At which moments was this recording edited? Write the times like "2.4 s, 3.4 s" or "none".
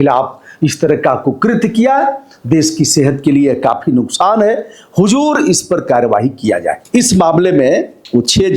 6.8 s